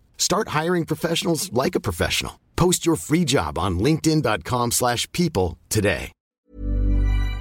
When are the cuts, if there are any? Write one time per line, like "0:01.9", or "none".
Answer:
0:06.4